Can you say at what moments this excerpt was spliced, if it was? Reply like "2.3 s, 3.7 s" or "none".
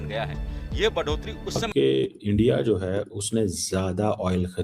1.6 s